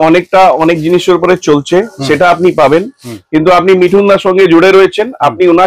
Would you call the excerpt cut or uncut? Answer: uncut